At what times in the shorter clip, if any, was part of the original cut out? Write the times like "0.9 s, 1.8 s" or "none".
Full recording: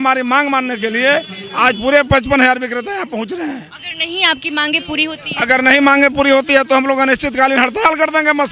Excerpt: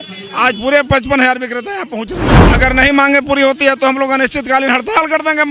2.4 s